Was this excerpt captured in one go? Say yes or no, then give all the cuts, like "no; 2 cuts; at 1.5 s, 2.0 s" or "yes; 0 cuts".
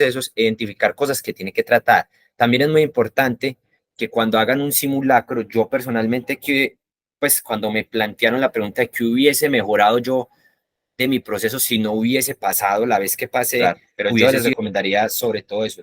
no; 1 cut; at 14.2 s